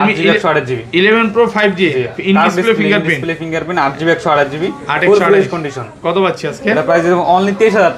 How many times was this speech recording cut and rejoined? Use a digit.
0